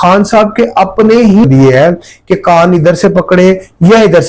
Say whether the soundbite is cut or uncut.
cut